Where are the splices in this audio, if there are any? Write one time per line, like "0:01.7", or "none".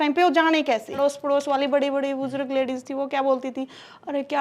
0:01.0